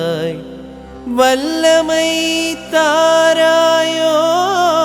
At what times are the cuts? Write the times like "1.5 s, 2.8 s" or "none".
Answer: none